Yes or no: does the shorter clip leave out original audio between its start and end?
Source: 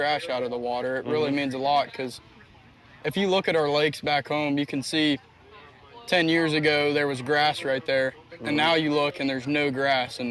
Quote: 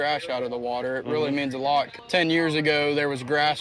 yes